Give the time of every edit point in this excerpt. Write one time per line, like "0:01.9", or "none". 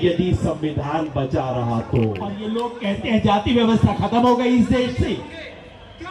0:02.5